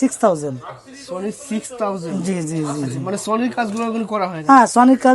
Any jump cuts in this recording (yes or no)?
no